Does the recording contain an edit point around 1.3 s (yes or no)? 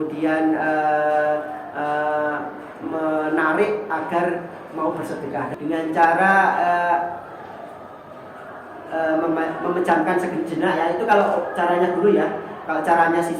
no